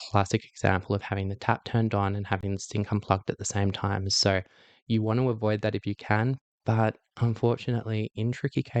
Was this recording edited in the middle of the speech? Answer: no; 0 cuts

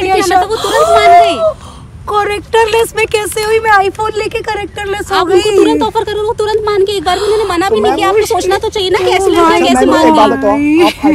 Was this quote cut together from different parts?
no; 0 cuts

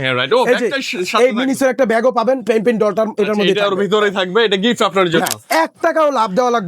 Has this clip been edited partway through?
yes; 1 cut; at 5.4 s

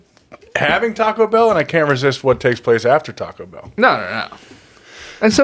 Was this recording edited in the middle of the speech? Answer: no; 0 cuts

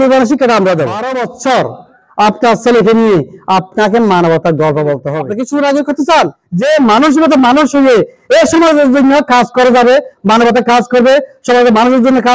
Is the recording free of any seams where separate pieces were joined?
no; 3 cuts; at 1.3 s, 5.2 s, 6.4 s

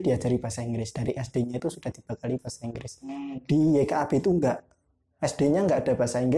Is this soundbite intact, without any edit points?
yes; 0 cuts

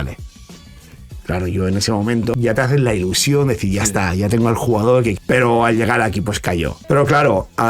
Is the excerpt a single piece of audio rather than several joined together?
no; 3 cuts; at 2.3 s, 5.2 s, 6.8 s

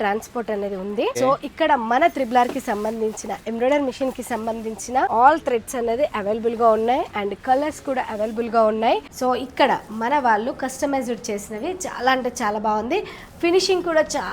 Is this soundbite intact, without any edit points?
no; 3 cuts; at 1.1 s, 5.1 s, 9.1 s

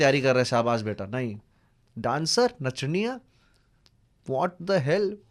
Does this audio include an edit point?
no; 0 cuts

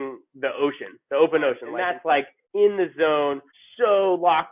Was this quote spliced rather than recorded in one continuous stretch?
yes; 1 cut; at 2.2 s

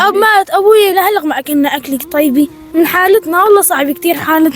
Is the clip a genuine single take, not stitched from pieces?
no; 1 cut; at 2.6 s

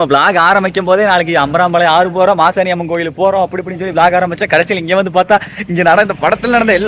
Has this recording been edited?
no; 0 cuts

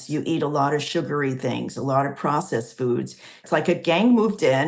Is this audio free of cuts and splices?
no; 1 cut; at 3.4 s

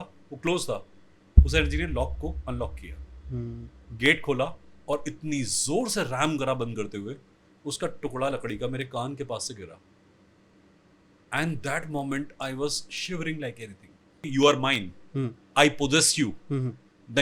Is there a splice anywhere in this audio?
yes; 1 cut; at 14.3 s

